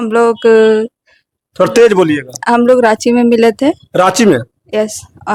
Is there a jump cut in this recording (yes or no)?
no